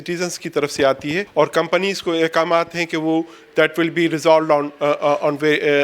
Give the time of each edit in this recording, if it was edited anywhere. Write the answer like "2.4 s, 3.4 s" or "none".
1.3 s